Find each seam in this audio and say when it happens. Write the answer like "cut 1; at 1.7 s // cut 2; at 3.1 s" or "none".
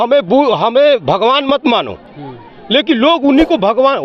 none